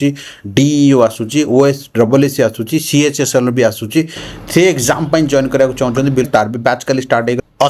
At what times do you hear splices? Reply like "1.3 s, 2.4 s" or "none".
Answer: none